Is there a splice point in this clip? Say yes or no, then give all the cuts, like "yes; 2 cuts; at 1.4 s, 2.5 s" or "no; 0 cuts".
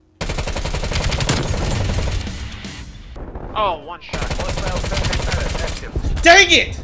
yes; 1 cut; at 3.1 s